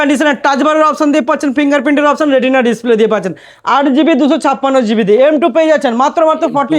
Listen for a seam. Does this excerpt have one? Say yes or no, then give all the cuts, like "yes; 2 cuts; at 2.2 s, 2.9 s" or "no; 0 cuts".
no; 0 cuts